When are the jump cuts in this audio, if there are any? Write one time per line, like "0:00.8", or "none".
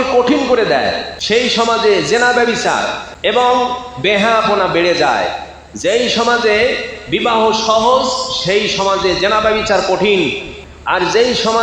0:01.1

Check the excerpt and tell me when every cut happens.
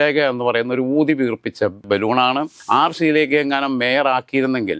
0:02.5

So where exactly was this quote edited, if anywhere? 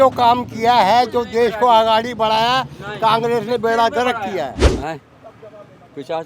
0:04.6

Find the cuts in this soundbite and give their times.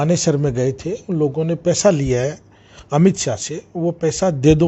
none

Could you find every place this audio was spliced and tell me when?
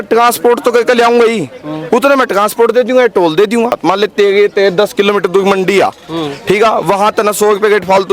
0:03.8

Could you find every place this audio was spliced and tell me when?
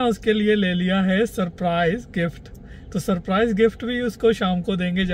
none

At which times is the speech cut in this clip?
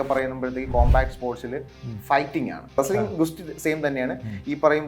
0:02.8

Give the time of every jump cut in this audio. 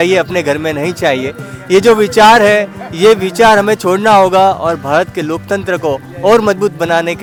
none

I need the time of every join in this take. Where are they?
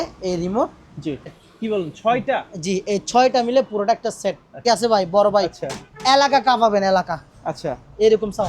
0:01.5
0:04.6

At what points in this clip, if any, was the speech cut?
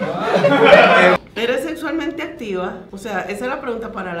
0:01.1
0:02.9

